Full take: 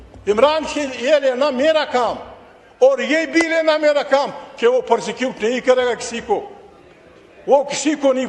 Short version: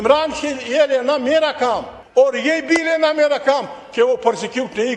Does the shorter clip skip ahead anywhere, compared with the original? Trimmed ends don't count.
yes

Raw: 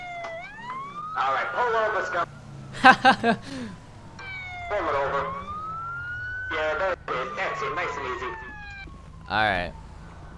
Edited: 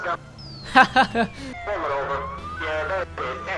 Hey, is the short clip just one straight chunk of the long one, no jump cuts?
no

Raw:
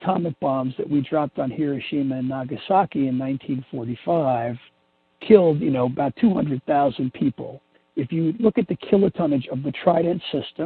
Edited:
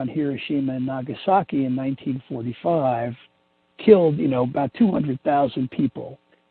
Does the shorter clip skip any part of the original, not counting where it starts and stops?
no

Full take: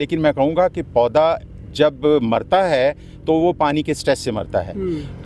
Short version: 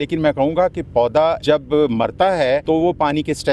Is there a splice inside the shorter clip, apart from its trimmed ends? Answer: yes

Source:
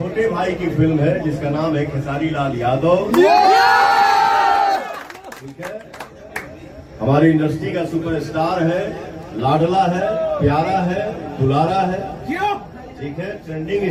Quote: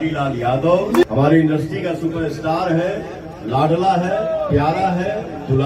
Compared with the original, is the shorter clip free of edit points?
no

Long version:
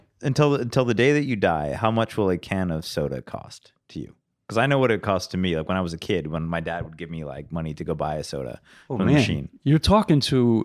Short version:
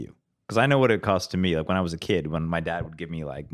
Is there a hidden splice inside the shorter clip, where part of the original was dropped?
no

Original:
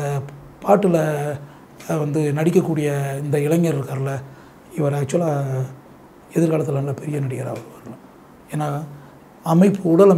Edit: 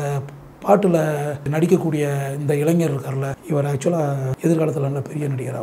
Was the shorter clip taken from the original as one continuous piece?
no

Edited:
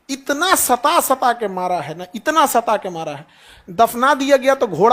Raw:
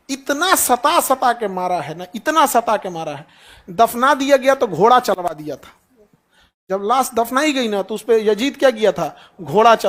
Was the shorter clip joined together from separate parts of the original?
no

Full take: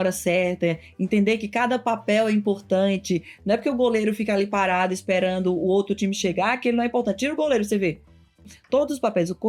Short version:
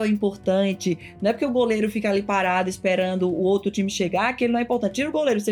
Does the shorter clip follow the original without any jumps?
yes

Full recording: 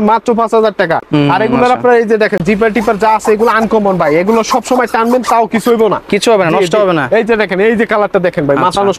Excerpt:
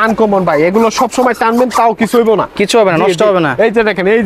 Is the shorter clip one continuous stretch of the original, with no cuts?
yes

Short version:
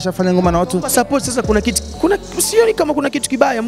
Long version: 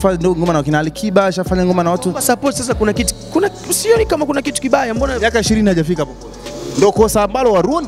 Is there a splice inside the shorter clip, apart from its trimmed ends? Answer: no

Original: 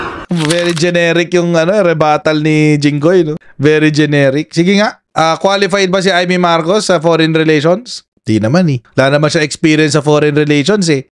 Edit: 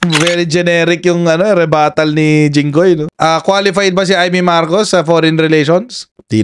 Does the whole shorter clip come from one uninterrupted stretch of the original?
no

